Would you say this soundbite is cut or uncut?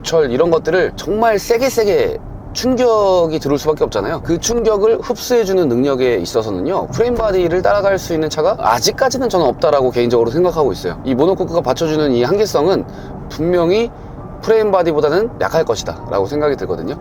uncut